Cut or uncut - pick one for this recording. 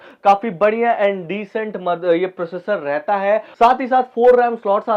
cut